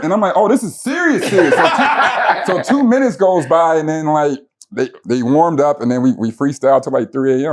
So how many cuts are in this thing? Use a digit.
0